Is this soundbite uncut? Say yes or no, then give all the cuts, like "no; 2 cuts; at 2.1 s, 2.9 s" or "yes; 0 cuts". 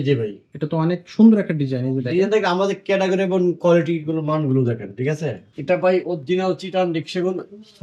no; 1 cut; at 5.5 s